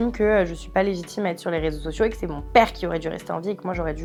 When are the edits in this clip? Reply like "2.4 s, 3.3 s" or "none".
none